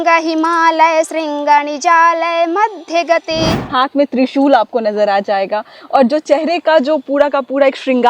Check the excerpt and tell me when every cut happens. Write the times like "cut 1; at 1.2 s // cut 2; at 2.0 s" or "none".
cut 1; at 3.6 s